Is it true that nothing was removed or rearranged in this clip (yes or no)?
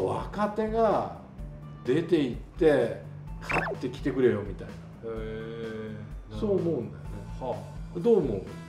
yes